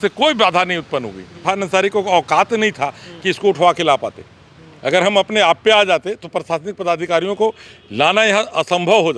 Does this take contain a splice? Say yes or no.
yes